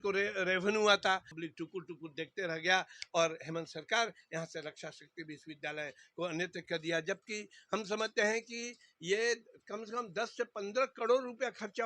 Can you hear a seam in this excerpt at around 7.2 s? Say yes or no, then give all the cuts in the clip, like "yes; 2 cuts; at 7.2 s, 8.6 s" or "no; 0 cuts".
no; 1 cut; at 1.4 s